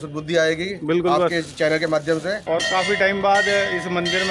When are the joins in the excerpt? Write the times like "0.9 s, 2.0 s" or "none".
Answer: 2.4 s